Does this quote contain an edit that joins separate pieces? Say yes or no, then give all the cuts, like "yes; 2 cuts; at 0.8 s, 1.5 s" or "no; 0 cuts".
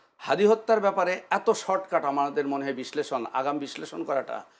no; 0 cuts